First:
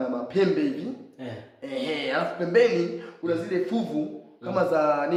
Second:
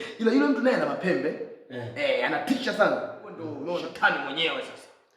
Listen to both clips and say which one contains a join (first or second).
second